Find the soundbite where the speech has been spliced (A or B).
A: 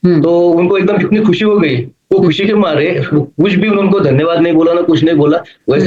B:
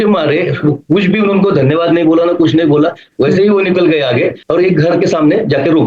B